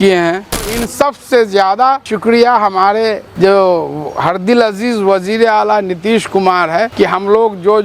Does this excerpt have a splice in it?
yes; 4 cuts; at 1.0 s, 2.1 s, 3.2 s, 6.9 s

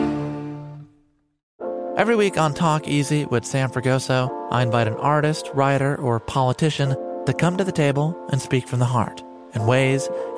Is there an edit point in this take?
no; 0 cuts

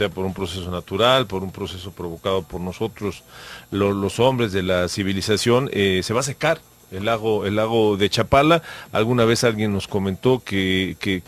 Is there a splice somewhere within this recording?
yes; 1 cut; at 5.6 s

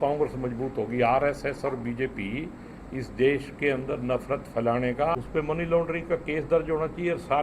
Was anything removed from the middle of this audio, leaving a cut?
yes; 1 cut; at 5.2 s

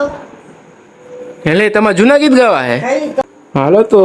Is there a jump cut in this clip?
yes; 1 cut; at 3.2 s

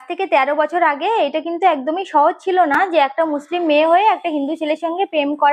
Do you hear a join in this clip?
no; 0 cuts

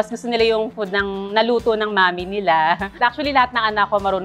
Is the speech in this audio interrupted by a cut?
yes; 1 cut; at 2.9 s

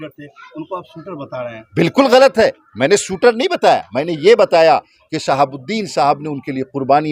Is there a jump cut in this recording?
no; 0 cuts

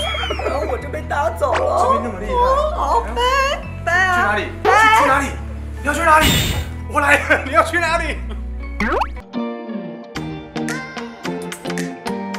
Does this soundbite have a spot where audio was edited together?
no; 0 cuts

